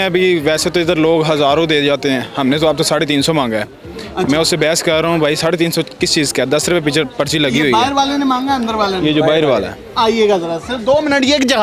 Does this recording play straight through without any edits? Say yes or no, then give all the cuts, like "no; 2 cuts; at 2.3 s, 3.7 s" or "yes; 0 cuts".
yes; 0 cuts